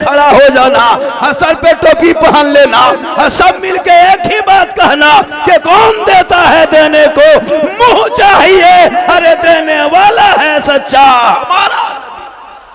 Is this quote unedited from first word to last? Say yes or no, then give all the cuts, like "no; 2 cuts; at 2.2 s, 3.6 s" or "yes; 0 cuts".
yes; 0 cuts